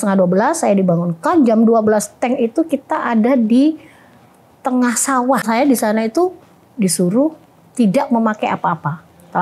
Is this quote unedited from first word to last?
no; 1 cut; at 5.5 s

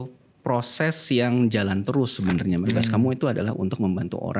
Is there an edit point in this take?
yes; 1 cut; at 2.6 s

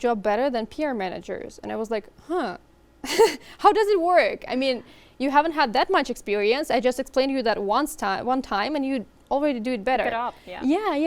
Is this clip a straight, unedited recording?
yes; 0 cuts

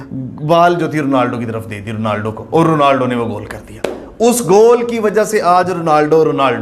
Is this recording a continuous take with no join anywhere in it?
yes; 0 cuts

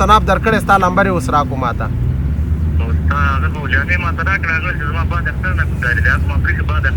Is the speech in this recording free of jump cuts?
yes; 0 cuts

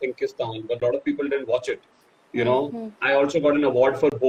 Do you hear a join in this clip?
no; 0 cuts

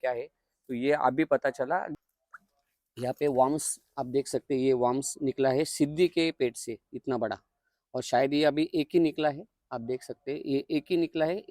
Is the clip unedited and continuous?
no; 1 cut; at 1.9 s

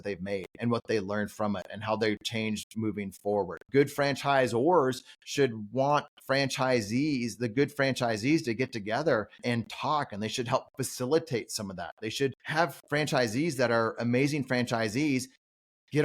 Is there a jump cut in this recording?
yes; 3 cuts; at 3.7 s, 9.4 s, 12.8 s

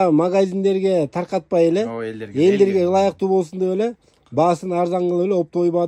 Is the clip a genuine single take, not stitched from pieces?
yes; 0 cuts

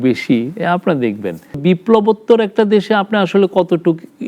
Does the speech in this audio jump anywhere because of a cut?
yes; 1 cut; at 1.6 s

